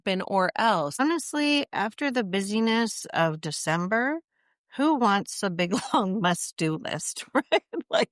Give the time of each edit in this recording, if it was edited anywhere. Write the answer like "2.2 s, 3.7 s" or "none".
1.0 s